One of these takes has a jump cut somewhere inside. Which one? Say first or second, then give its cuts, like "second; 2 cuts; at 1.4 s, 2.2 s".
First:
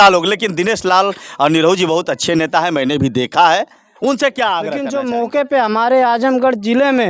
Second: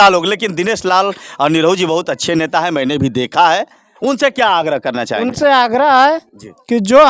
first; 1 cut; at 4.8 s